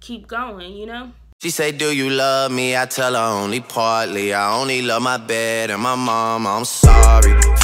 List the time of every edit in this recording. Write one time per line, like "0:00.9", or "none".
0:01.3